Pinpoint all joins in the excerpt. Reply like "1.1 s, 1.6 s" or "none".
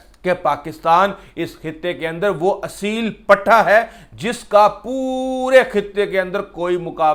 none